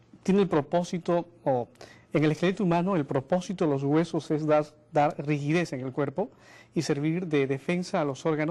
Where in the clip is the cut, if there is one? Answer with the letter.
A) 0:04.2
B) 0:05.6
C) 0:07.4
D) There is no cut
A